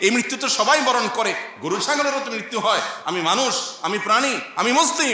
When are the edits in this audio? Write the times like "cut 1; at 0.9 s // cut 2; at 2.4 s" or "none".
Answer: none